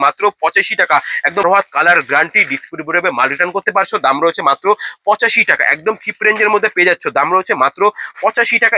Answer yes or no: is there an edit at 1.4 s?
yes